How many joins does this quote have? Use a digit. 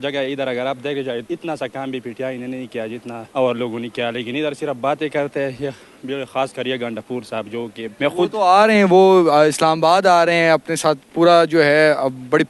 3